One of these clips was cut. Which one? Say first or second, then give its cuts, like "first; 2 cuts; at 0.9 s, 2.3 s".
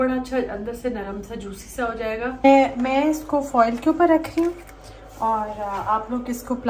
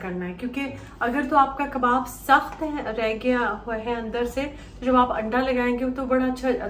first; 1 cut; at 2.4 s